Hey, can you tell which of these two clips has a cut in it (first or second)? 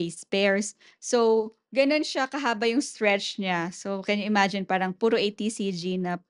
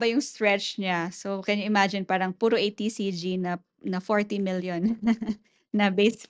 first